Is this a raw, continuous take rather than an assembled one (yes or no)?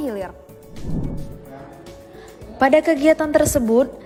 yes